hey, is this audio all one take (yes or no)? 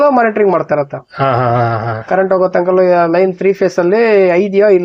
yes